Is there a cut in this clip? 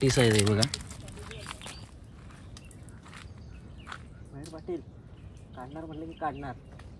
yes; 1 cut; at 1.9 s

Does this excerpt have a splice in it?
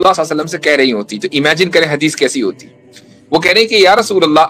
no; 0 cuts

